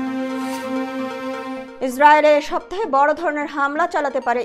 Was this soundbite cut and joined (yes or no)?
yes